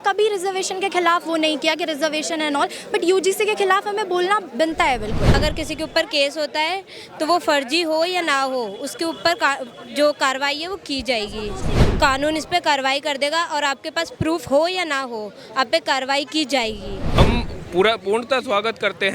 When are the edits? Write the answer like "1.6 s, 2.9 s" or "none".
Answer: 5.4 s, 11.8 s, 17.2 s